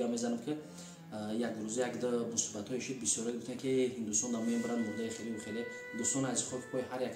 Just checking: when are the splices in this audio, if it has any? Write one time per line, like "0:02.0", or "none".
none